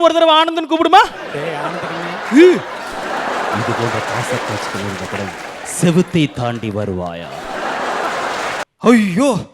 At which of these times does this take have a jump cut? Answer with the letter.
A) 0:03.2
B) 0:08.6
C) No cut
B